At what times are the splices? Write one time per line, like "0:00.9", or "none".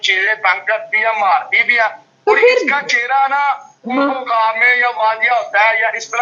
none